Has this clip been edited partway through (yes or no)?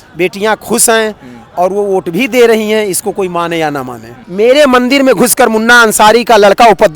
yes